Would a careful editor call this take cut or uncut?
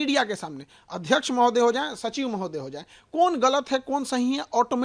uncut